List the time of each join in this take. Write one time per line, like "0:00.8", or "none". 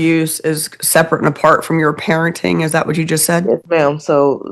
none